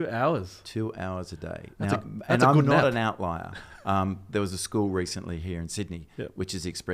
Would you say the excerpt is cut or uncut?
uncut